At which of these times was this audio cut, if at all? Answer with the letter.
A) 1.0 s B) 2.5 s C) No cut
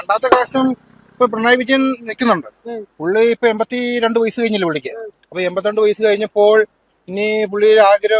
C